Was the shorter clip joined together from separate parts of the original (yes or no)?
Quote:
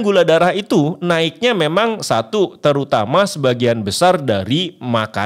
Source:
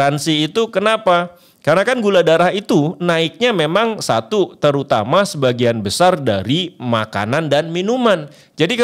no